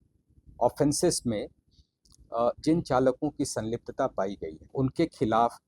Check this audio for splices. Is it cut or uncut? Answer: cut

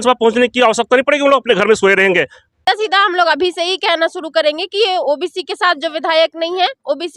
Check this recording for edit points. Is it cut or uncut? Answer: cut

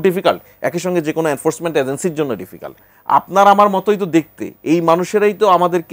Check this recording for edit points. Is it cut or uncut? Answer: cut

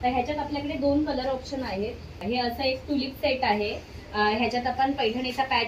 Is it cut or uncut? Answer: cut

